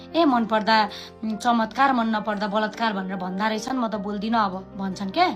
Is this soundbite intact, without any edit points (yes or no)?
yes